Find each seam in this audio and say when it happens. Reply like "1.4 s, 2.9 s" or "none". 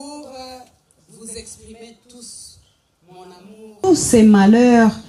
3.8 s